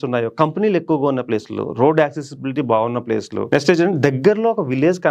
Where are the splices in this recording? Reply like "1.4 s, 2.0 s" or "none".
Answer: 3.4 s

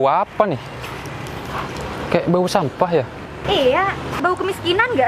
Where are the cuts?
3.3 s, 4.2 s

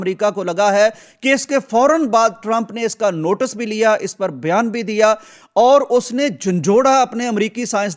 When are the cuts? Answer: none

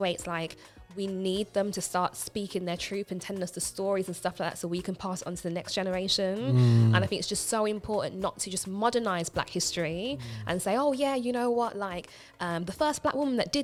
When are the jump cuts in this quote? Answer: none

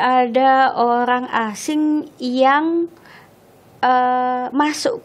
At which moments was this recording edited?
none

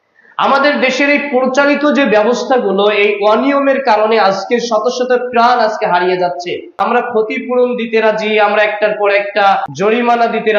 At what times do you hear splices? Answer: 7.1 s, 9.7 s

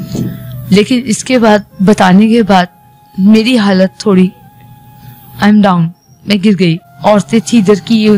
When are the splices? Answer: 6.9 s

